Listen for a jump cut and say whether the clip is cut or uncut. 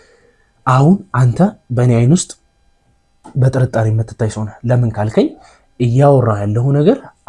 uncut